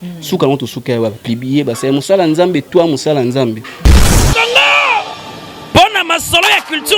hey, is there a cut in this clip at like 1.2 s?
no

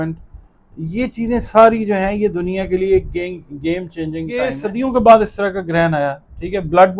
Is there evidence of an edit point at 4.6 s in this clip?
yes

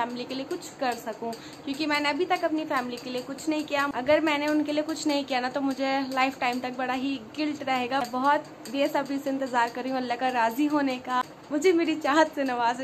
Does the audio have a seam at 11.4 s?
yes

